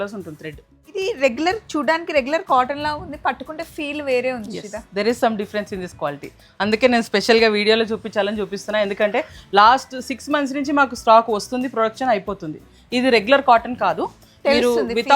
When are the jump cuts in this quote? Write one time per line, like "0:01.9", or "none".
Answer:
0:01.0